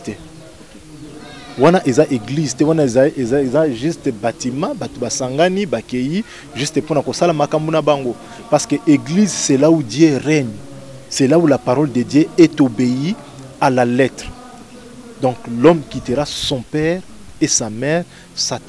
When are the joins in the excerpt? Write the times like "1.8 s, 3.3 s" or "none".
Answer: none